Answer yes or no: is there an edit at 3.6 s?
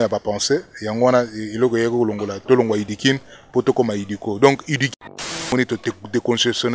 no